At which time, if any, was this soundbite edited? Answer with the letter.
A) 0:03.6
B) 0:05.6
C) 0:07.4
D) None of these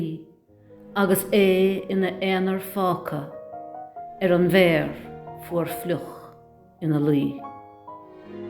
C